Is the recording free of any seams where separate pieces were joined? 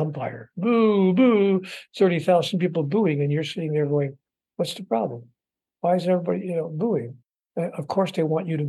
yes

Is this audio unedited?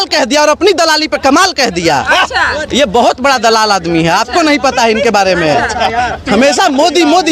yes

